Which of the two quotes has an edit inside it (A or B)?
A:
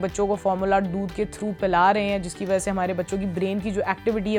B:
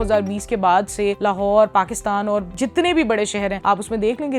B